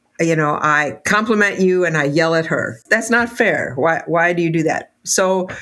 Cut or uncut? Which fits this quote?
cut